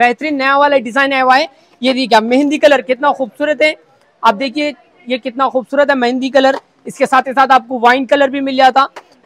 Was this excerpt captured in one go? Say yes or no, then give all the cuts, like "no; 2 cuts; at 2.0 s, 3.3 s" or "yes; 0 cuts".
yes; 0 cuts